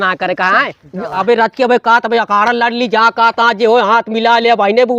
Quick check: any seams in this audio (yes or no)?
yes